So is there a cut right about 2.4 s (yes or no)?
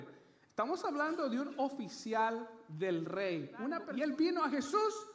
no